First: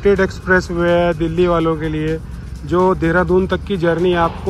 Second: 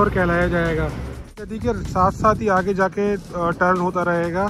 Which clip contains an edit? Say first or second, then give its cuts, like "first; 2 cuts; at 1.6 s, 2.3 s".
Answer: second; 1 cut; at 1.4 s